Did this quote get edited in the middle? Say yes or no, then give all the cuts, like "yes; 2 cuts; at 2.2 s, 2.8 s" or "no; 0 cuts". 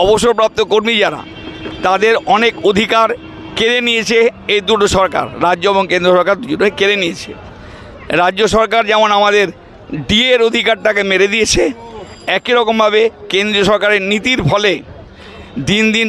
no; 0 cuts